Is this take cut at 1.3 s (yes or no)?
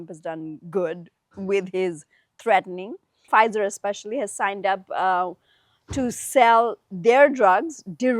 no